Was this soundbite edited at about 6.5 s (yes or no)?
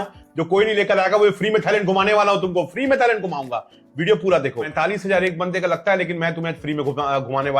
no